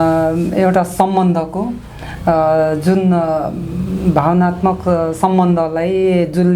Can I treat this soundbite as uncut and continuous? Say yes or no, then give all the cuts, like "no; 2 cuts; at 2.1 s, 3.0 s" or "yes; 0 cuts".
yes; 0 cuts